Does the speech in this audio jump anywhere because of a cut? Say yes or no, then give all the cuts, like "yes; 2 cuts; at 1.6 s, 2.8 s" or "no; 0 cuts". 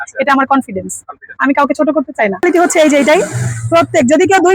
yes; 1 cut; at 2.4 s